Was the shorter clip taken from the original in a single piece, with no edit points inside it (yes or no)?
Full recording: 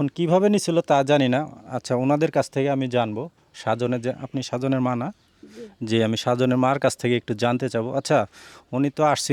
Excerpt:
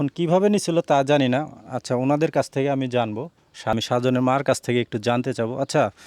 no